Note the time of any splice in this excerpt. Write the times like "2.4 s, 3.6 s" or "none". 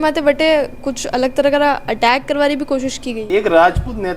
3.2 s